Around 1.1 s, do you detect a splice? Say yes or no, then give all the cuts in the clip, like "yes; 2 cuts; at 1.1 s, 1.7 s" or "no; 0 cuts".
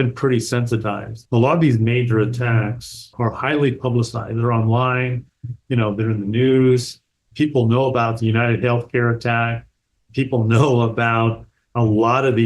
yes; 1 cut; at 1.1 s